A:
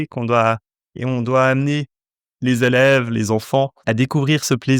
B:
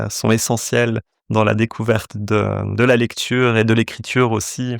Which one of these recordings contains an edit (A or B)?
A